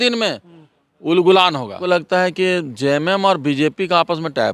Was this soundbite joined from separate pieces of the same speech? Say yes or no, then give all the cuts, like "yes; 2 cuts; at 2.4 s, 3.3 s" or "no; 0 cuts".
yes; 1 cut; at 1.8 s